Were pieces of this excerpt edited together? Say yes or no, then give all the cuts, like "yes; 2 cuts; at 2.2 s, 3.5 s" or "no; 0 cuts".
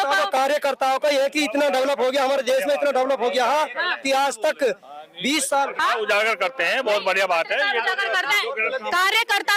no; 0 cuts